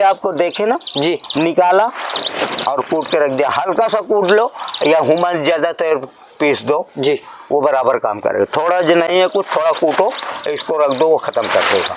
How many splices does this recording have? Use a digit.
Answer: 0